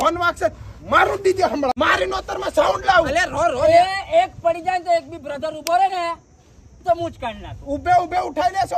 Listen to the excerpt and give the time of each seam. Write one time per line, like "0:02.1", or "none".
0:01.8